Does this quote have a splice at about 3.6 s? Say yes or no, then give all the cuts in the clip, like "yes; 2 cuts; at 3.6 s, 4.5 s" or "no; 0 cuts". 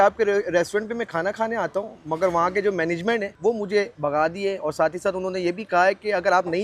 yes; 1 cut; at 3.6 s